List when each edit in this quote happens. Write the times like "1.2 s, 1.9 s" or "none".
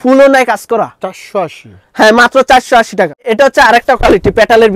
none